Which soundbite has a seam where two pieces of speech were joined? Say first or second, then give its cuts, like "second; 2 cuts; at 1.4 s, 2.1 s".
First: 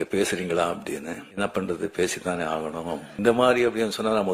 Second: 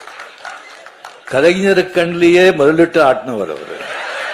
first; 2 cuts; at 1.2 s, 3.2 s